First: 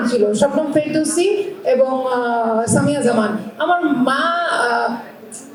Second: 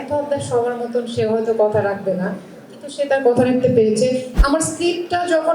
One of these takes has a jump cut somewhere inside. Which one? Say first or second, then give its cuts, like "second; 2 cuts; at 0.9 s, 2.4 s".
second; 1 cut; at 4.3 s